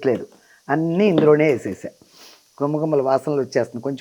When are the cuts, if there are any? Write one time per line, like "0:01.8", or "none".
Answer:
none